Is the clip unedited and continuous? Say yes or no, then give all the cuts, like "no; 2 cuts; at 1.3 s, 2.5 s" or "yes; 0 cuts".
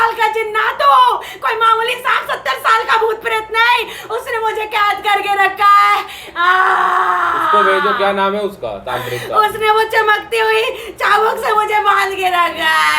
yes; 0 cuts